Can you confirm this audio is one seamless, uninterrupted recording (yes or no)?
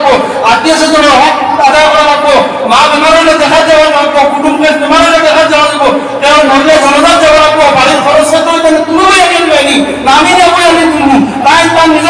yes